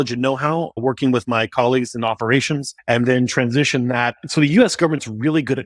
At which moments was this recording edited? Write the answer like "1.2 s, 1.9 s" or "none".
0.8 s, 2.7 s, 4.2 s